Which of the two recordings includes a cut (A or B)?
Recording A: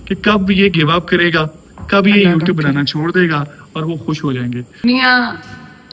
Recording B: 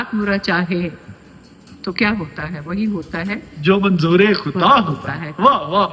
A